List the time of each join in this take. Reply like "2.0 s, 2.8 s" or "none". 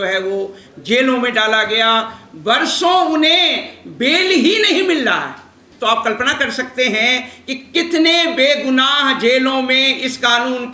5.6 s